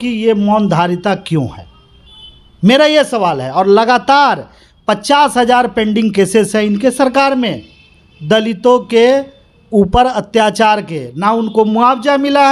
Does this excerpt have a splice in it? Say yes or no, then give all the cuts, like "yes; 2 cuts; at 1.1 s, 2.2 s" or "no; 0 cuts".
no; 0 cuts